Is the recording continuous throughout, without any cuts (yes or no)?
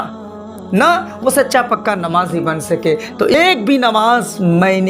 no